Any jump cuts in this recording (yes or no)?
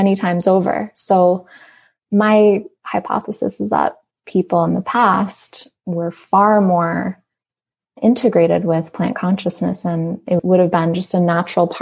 no